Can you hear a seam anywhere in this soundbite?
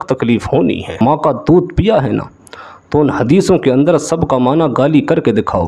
yes; 1 cut; at 1.0 s

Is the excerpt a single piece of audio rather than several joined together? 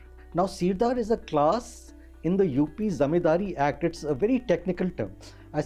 yes; 0 cuts

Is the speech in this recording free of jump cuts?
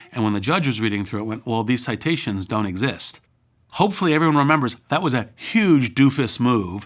no; 1 cut; at 3.4 s

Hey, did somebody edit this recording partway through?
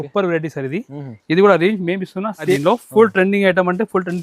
yes; 1 cut; at 2.6 s

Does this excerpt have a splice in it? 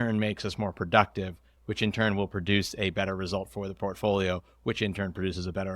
yes; 1 cut; at 1.5 s

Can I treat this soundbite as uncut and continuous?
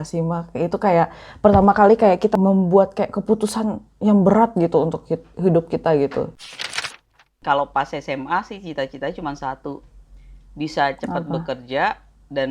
no; 2 cuts; at 2.3 s, 6.9 s

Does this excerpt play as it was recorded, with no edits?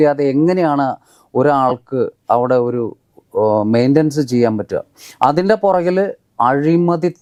yes; 0 cuts

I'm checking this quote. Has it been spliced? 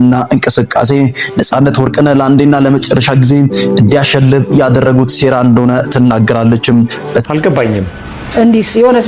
yes; 1 cut; at 7.2 s

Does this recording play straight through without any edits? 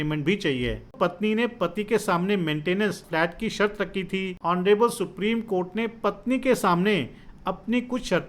no; 3 cuts; at 0.9 s, 3.0 s, 4.3 s

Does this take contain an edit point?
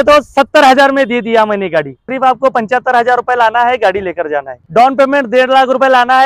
yes; 2 cuts; at 2.1 s, 4.6 s

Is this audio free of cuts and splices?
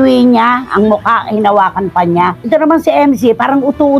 no; 1 cut; at 2.4 s

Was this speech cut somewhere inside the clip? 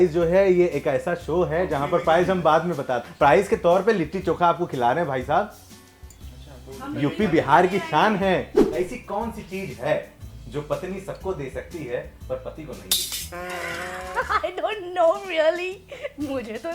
yes; 1 cut; at 8.6 s

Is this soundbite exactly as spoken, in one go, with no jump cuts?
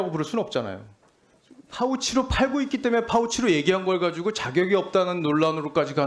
no; 1 cut; at 1.3 s

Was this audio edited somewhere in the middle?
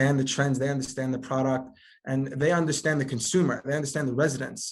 no; 0 cuts

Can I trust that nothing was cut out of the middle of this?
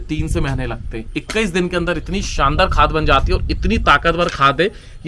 no; 1 cut; at 1.1 s

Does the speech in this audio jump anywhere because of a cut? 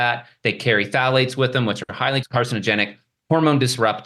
yes; 1 cut; at 2.2 s

